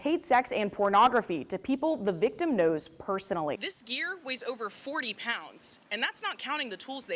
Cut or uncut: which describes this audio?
cut